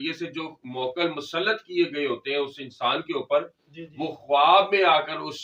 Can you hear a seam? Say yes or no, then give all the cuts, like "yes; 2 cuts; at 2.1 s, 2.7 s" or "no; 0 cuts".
no; 0 cuts